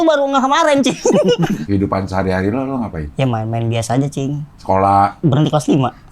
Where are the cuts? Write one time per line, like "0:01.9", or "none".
0:01.6
0:03.0
0:05.2